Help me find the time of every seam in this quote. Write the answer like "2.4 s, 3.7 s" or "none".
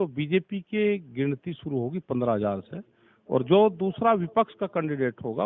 none